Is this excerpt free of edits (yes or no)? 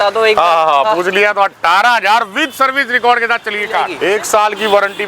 no